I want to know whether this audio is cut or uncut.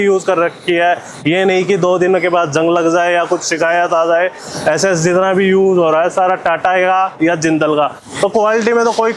cut